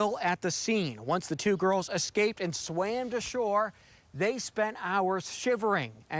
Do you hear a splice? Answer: no; 0 cuts

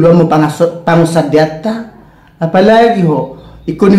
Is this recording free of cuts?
yes; 0 cuts

